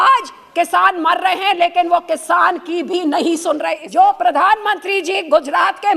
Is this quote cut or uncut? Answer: cut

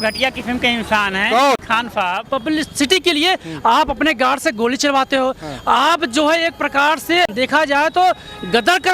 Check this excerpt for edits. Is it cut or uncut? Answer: cut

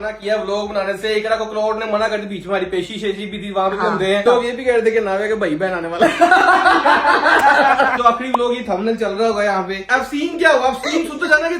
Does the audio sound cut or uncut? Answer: cut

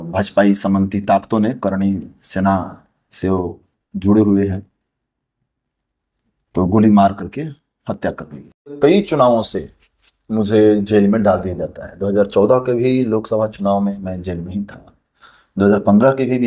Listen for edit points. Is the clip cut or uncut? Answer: cut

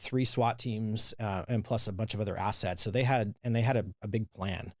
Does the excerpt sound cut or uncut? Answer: uncut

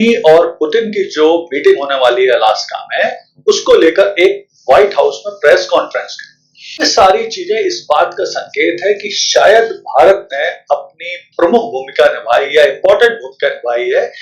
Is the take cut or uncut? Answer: cut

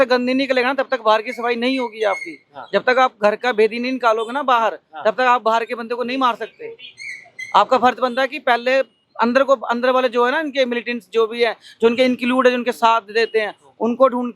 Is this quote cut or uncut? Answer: uncut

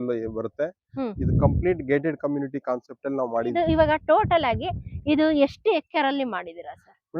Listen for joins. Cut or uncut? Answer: cut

